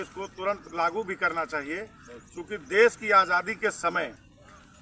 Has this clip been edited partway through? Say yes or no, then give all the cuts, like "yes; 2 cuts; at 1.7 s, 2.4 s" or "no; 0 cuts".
no; 0 cuts